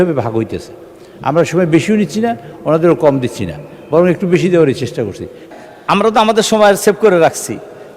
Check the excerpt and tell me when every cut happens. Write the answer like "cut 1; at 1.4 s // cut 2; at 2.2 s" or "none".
cut 1; at 5.5 s